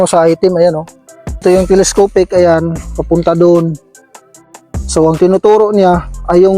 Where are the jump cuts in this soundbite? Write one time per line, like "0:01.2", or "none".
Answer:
0:01.4